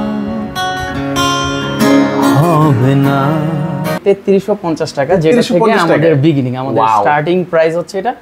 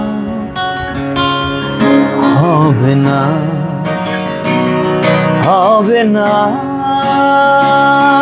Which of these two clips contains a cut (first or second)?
first